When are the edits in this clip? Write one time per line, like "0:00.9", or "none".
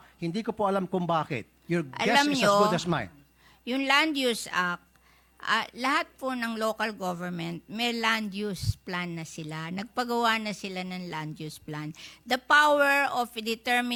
none

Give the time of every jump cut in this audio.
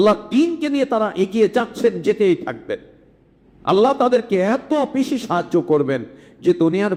none

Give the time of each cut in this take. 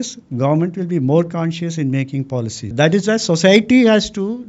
0:02.7

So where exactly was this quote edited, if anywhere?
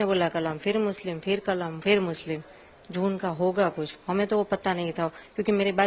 none

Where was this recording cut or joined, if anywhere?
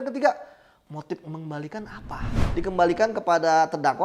0:02.4

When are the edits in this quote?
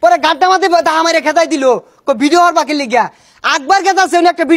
none

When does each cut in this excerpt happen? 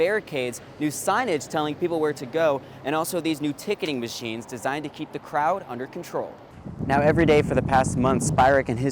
0:06.4

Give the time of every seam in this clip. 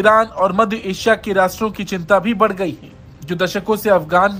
none

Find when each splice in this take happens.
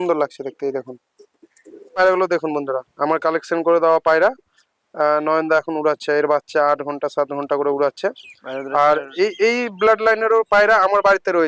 0:02.0

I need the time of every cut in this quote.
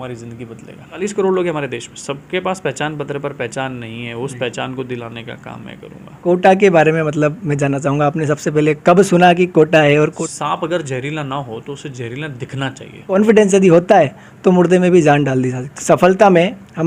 0:01.0
0:06.2
0:10.1
0:13.1
0:15.7

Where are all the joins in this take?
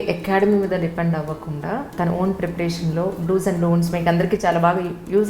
0:01.9

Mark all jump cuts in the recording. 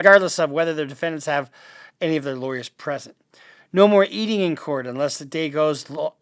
none

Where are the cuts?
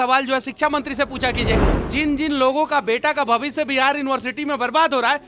0:01.8

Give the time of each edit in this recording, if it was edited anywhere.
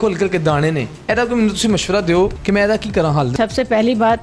0:00.9
0:02.4
0:03.3

